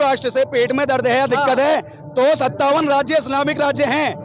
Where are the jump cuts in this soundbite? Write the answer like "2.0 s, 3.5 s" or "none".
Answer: none